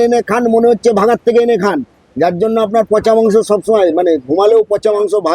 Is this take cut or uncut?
cut